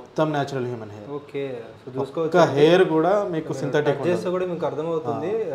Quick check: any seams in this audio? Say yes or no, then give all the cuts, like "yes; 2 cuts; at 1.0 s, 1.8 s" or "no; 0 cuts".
no; 0 cuts